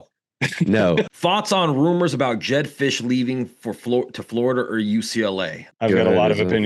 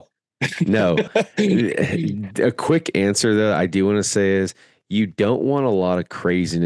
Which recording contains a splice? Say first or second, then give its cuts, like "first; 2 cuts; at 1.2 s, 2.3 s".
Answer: first; 2 cuts; at 1.1 s, 5.7 s